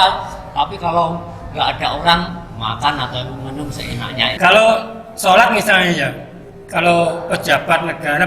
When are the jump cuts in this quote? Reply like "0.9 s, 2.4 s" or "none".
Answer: 4.4 s